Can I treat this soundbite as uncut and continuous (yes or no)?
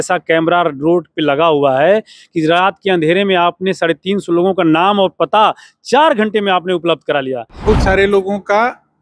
no